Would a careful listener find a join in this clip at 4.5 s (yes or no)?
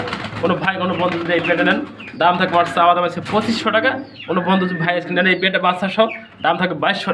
no